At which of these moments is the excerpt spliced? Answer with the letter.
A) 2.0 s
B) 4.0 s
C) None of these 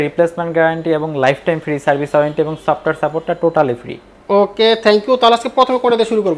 C